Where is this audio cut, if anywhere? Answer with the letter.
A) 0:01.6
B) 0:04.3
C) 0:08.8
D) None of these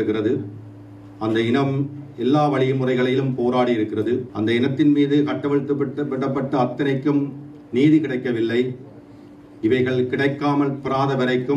B